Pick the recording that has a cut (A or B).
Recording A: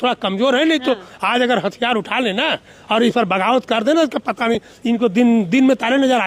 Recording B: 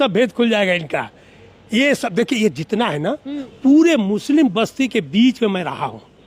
B